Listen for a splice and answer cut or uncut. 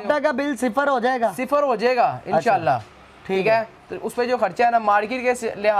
uncut